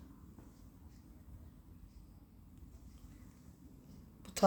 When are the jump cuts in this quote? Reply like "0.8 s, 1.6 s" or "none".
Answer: none